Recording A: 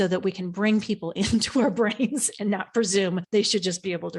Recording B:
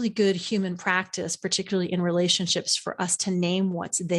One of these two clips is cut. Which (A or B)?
A